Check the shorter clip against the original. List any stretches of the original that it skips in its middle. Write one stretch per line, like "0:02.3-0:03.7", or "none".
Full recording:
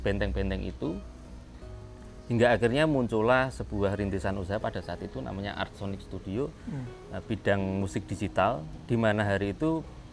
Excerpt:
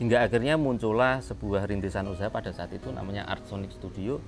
none